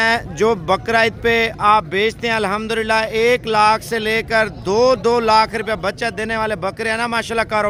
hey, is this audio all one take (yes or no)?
yes